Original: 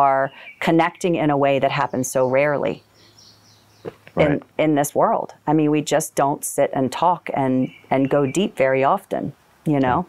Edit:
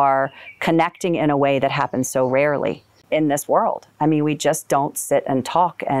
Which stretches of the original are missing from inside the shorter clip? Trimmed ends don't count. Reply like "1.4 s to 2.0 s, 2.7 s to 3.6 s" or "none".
3.0 s to 4.5 s